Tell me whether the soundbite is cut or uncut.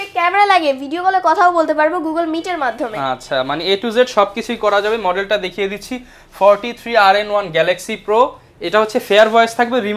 uncut